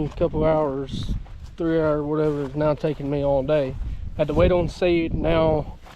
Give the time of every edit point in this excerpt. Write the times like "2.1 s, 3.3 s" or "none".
none